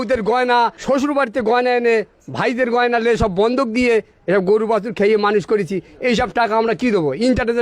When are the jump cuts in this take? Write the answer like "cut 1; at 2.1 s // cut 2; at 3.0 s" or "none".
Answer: none